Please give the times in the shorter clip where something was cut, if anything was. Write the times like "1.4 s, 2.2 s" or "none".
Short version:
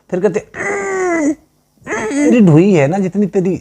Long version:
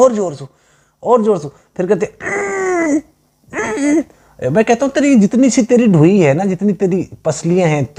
2.3 s